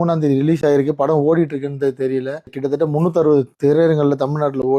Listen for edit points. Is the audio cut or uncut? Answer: cut